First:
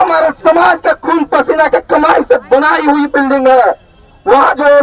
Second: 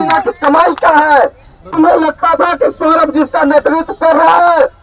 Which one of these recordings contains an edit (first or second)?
second